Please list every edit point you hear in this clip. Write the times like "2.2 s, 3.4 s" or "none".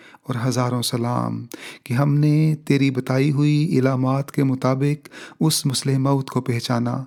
none